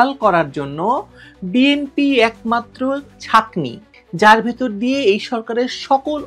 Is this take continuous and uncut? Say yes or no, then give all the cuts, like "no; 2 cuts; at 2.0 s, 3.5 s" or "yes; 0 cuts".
no; 1 cut; at 3.9 s